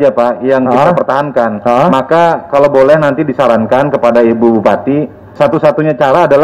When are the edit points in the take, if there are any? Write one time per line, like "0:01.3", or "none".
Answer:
0:05.2